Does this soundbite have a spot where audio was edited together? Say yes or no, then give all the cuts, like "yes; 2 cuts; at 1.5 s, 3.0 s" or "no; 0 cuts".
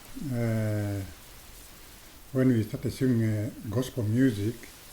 no; 0 cuts